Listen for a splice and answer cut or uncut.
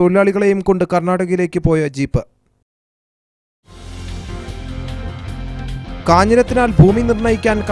uncut